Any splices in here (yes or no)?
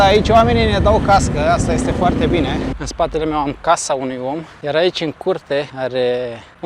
yes